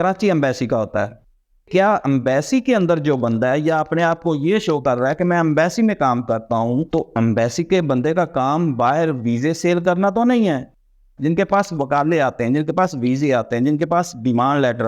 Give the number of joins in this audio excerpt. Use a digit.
2